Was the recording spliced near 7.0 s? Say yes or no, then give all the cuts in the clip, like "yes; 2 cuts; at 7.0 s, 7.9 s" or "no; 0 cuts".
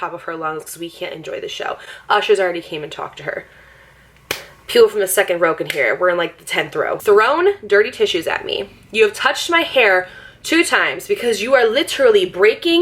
yes; 1 cut; at 7.0 s